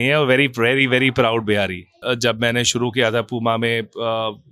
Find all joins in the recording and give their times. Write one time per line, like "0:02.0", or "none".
0:02.0